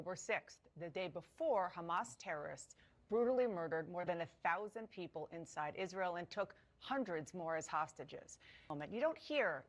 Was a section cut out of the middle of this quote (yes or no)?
yes